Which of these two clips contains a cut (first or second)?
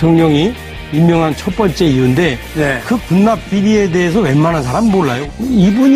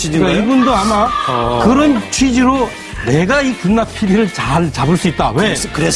first